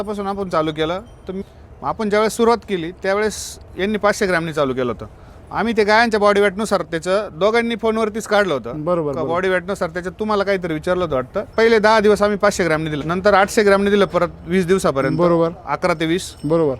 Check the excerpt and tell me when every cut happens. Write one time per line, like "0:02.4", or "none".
0:01.4
0:11.5
0:13.0